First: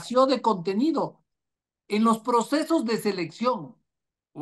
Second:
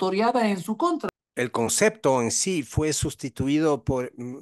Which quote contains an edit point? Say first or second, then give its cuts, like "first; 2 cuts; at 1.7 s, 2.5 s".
second; 1 cut; at 1.0 s